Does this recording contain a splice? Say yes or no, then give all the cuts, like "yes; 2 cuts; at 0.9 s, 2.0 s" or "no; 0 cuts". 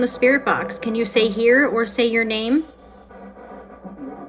yes; 1 cut; at 2.9 s